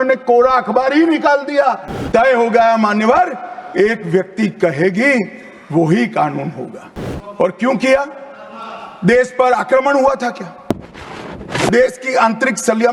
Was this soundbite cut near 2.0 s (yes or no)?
yes